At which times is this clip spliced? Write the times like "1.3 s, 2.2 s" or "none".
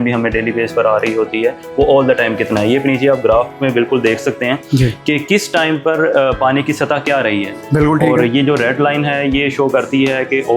1.6 s